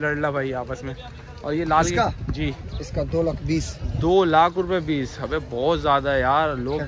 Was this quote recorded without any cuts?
yes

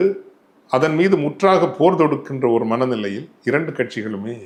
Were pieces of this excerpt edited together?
no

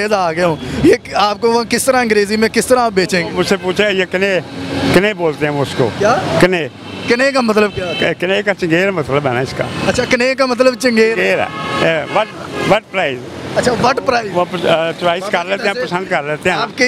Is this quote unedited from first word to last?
yes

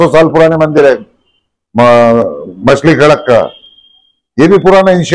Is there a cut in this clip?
no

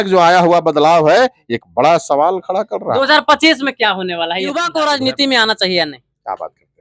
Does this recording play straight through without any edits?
no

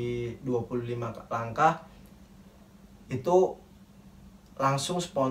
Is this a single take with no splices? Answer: yes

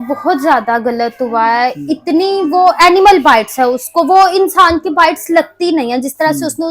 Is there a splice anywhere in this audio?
no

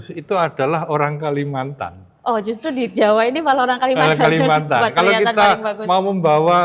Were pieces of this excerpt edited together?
no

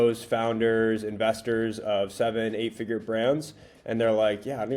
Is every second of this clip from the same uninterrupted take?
yes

